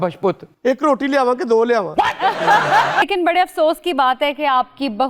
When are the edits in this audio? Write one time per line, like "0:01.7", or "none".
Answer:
0:03.0

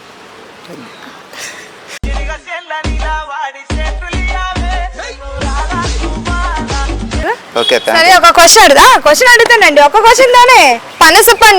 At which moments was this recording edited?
0:07.2

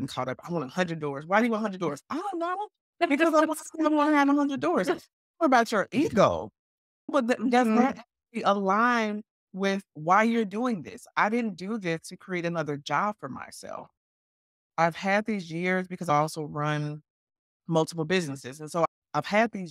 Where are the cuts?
0:16.1

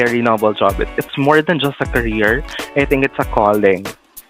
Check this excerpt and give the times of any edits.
0:00.9

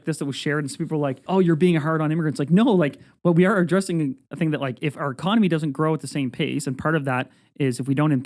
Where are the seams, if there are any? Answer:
0:01.2

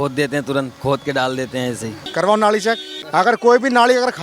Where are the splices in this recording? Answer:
0:01.9
0:02.9

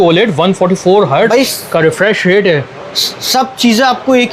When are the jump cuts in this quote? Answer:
none

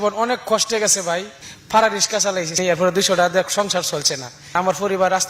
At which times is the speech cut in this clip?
0:01.4
0:02.6
0:04.5

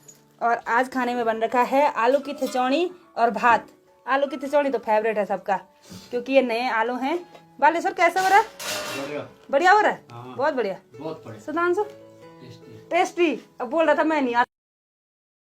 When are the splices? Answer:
none

